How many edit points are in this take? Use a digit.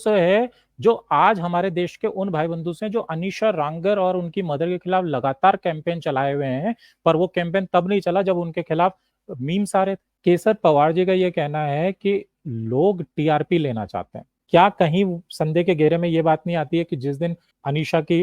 2